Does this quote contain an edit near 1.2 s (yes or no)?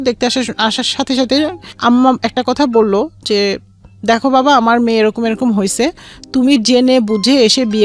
no